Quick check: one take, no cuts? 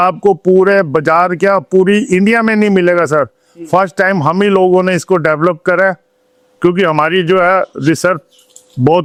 yes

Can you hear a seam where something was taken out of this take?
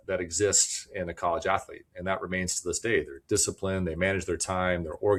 no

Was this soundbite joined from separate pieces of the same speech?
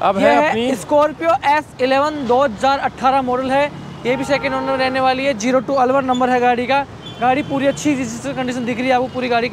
no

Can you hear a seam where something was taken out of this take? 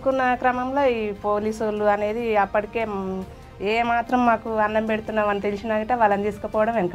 no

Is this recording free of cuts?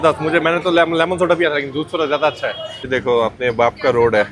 no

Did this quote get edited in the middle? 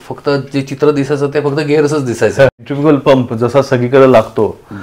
yes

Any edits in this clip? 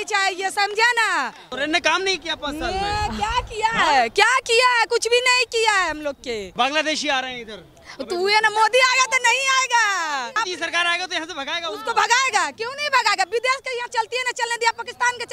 yes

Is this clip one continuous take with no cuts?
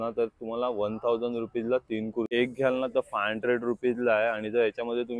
no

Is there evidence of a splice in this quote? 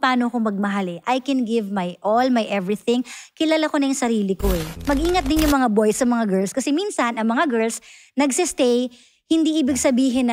yes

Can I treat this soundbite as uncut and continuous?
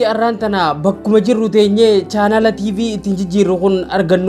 yes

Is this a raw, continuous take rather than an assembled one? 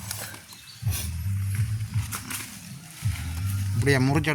yes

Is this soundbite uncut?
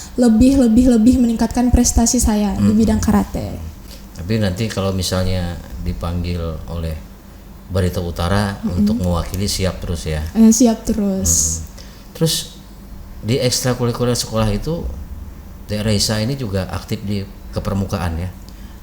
yes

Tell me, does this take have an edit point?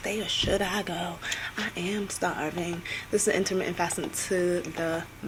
no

